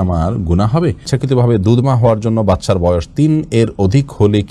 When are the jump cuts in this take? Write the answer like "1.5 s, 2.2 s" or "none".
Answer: 1.1 s